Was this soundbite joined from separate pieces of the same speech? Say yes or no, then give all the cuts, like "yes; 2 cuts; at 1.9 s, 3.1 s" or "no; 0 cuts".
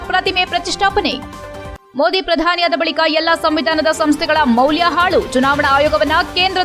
no; 0 cuts